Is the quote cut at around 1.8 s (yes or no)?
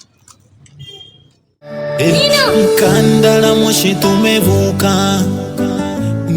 yes